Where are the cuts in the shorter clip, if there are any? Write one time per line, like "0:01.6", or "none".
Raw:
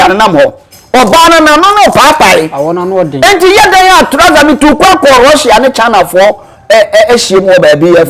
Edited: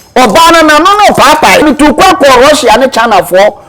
0:01.6